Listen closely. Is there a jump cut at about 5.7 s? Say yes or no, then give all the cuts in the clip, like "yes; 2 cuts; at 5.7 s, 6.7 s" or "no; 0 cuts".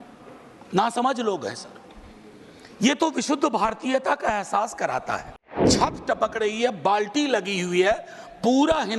yes; 1 cut; at 5.7 s